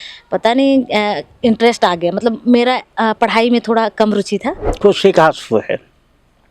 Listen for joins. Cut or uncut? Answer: cut